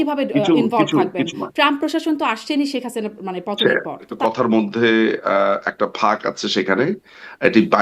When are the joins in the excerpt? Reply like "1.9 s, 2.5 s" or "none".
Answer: 4.1 s